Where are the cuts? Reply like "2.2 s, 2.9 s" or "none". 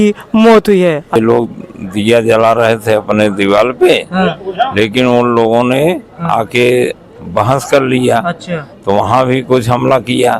1.2 s

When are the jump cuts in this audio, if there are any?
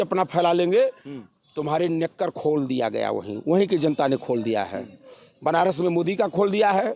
none

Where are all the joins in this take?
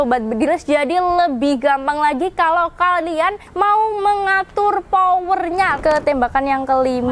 5.7 s

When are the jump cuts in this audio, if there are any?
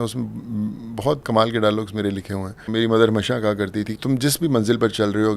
2.7 s, 3.9 s

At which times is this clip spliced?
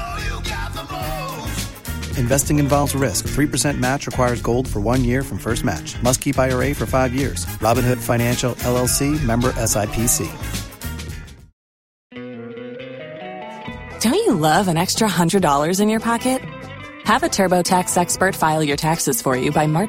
12.2 s

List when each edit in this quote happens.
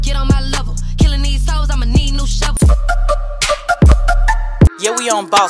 2.5 s

